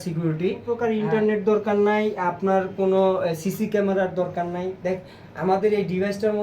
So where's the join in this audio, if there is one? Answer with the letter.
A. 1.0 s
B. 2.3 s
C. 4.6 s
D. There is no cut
A